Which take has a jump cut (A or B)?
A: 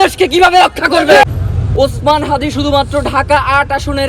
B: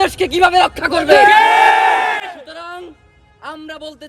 A